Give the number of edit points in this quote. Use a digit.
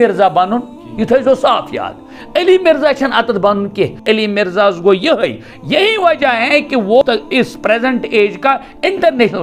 2